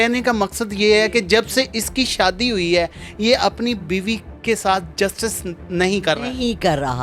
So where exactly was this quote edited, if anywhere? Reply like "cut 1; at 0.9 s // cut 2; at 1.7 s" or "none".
none